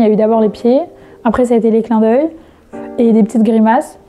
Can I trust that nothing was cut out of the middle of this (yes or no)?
yes